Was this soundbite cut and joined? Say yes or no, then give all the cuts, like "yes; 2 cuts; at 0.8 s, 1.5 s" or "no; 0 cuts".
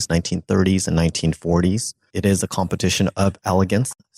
yes; 1 cut; at 2.1 s